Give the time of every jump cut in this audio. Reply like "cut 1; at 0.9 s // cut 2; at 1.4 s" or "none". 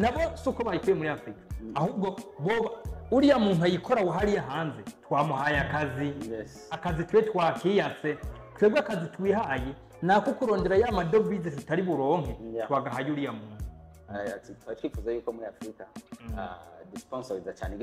cut 1; at 14.0 s